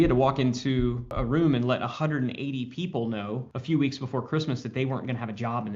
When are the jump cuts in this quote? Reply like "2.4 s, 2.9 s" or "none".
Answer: 1.2 s, 3.5 s